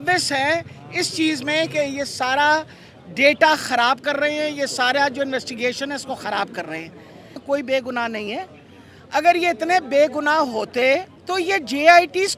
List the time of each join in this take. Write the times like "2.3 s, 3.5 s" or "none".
7.4 s, 11.2 s

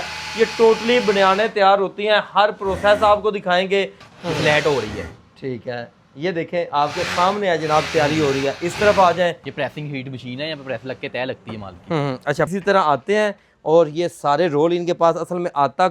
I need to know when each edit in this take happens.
4.0 s, 9.5 s, 12.5 s

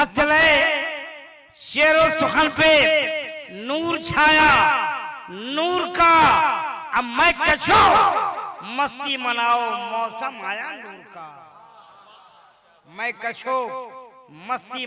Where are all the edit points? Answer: none

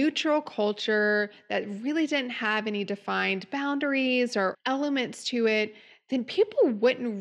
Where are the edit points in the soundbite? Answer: 4.6 s

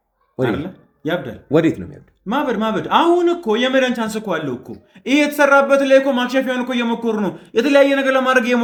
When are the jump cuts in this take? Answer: none

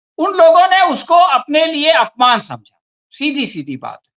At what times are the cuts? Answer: none

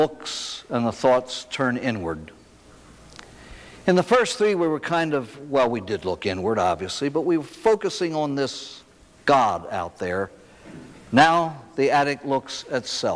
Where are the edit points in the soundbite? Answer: none

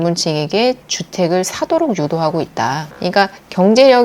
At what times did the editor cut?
none

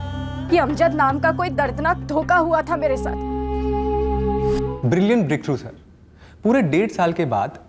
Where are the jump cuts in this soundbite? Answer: 4.7 s

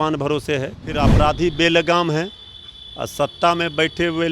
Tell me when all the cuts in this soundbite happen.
1.1 s

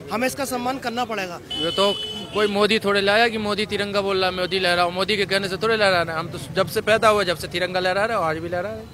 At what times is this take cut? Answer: 1.4 s

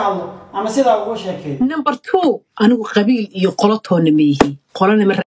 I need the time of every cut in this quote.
1.5 s

